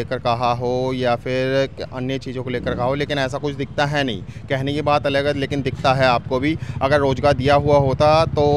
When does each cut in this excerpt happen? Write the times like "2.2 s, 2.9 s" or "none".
none